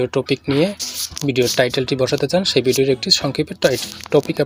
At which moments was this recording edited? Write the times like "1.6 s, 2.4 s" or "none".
none

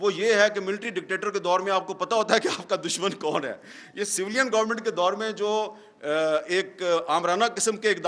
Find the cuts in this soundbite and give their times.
none

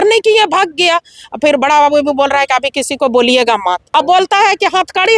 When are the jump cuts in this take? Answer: 1.2 s, 3.8 s

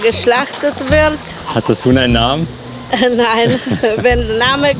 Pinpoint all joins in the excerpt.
1.4 s

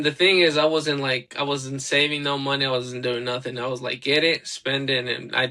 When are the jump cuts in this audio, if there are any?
none

